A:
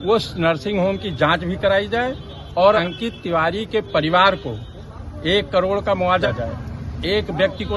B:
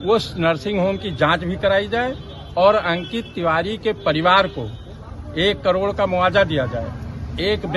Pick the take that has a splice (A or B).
A